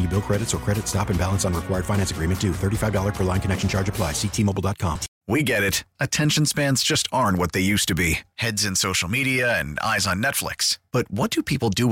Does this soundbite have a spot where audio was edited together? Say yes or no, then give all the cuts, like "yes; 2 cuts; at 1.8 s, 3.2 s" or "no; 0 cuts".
yes; 1 cut; at 5.1 s